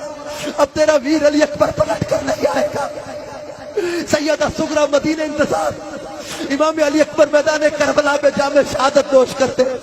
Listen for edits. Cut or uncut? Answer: uncut